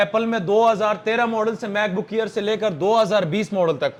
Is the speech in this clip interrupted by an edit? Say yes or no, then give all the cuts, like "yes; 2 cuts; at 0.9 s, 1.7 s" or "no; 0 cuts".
no; 0 cuts